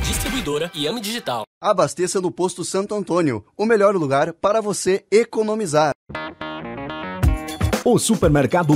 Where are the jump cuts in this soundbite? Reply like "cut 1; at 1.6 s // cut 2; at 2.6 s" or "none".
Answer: cut 1; at 6.1 s